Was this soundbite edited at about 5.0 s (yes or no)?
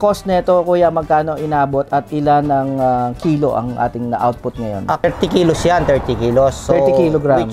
yes